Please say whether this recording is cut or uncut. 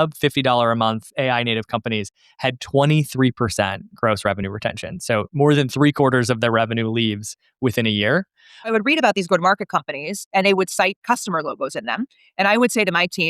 cut